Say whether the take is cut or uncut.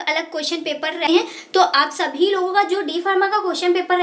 uncut